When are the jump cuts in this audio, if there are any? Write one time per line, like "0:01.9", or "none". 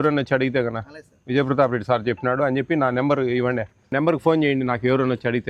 0:03.9

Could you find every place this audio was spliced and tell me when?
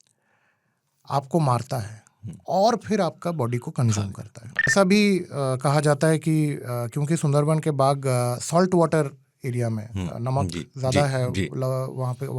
0:04.7

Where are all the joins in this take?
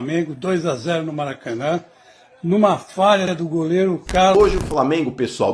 0:04.3

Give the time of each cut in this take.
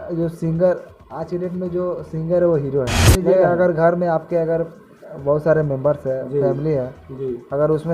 0:03.0

